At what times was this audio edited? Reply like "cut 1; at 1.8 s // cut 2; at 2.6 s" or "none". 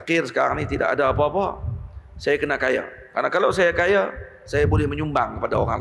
none